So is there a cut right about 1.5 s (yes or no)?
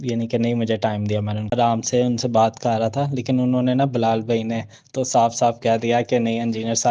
yes